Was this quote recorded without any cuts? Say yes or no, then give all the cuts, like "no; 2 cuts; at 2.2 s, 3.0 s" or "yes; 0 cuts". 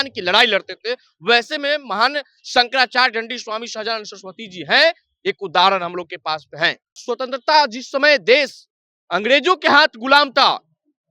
no; 1 cut; at 7.0 s